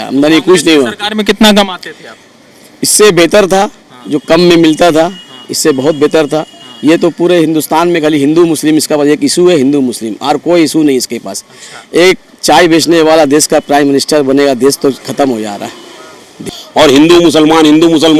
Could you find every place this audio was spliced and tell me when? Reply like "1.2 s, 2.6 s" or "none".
16.4 s